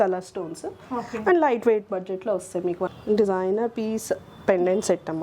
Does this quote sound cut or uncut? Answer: cut